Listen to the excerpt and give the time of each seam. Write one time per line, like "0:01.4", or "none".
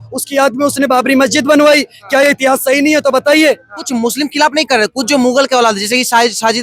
0:03.9